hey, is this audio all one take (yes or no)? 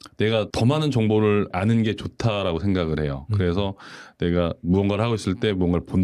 yes